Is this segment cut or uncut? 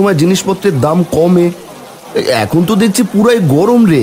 uncut